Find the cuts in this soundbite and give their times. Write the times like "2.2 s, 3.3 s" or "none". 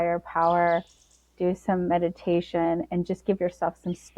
none